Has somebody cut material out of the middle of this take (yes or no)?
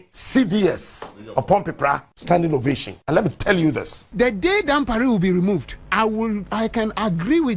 yes